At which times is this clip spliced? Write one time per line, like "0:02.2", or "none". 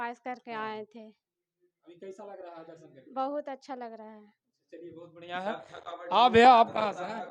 none